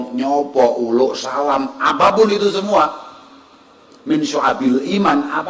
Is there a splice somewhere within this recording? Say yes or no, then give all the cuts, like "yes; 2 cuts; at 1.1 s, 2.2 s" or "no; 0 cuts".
no; 0 cuts